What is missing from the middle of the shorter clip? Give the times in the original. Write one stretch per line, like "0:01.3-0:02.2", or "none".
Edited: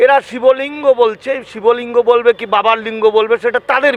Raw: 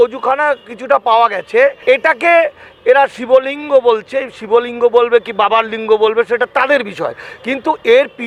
none